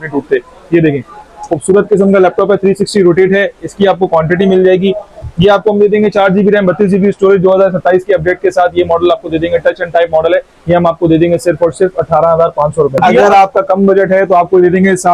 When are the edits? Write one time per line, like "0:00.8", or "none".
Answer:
0:13.0